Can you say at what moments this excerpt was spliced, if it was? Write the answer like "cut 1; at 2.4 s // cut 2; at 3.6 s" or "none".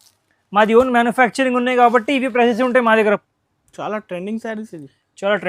cut 1; at 3.2 s